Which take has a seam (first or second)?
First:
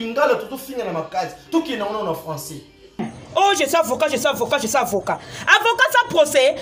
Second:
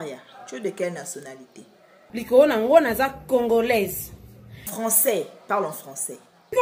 first